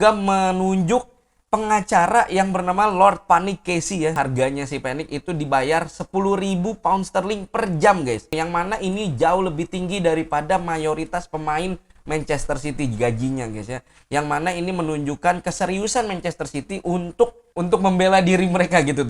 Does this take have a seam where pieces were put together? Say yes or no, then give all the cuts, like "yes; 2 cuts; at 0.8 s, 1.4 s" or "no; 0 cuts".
yes; 2 cuts; at 4.1 s, 8.3 s